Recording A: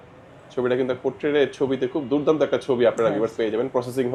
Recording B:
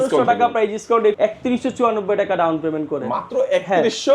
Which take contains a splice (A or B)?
B